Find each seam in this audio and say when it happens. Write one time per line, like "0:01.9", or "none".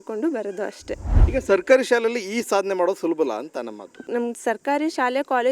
0:01.1
0:04.0